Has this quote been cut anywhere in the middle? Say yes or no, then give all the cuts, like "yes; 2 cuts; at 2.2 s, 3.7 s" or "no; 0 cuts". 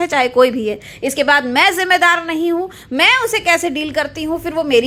no; 0 cuts